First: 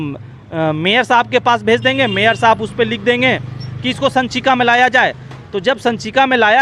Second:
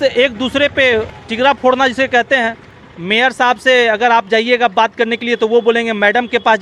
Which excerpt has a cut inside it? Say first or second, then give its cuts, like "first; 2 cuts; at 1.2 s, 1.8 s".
second; 1 cut; at 1.2 s